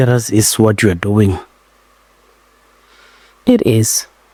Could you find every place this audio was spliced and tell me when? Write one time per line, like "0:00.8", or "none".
none